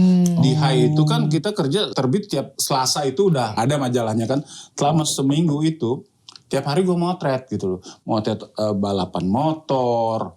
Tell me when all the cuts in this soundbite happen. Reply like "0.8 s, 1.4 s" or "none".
2.2 s, 3.5 s